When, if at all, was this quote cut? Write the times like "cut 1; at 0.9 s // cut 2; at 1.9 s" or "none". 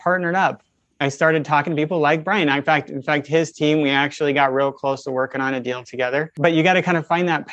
cut 1; at 6.3 s